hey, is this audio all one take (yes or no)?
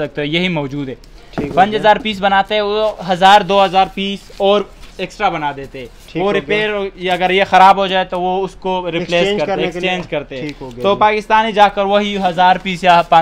yes